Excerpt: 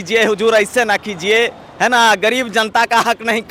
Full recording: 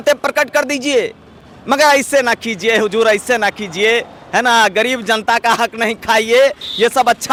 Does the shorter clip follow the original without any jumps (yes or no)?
yes